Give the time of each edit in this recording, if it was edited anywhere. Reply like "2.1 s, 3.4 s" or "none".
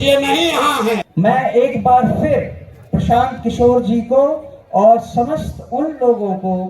1.1 s